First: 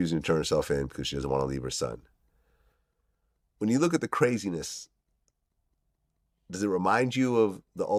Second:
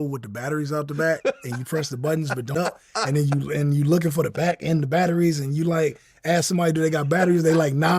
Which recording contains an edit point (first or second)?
second